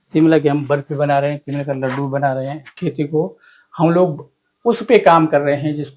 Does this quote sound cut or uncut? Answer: cut